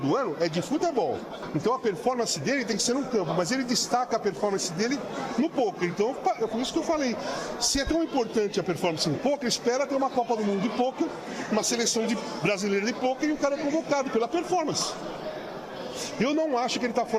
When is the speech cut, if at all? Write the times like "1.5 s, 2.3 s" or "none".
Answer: none